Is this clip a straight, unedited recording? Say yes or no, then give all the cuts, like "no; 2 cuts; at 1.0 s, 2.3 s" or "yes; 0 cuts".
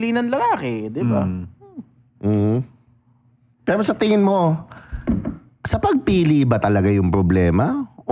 yes; 0 cuts